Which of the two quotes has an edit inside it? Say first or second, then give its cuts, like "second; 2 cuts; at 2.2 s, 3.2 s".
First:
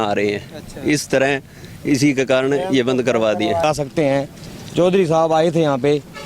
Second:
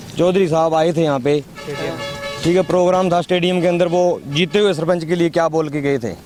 first; 1 cut; at 3.6 s